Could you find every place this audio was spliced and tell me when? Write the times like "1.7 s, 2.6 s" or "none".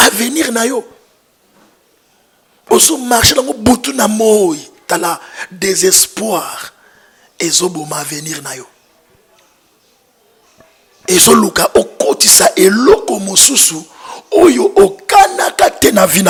none